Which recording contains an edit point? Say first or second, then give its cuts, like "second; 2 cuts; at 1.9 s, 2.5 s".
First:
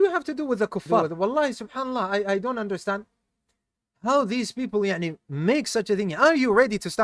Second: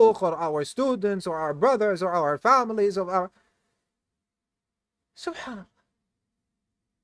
first; 1 cut; at 1.1 s